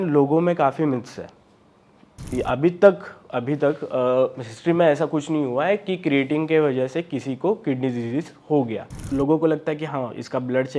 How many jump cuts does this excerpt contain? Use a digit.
2